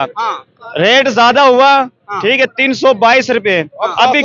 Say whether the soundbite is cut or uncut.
uncut